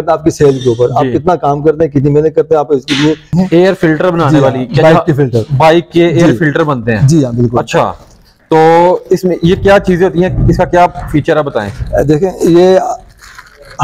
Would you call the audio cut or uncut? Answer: cut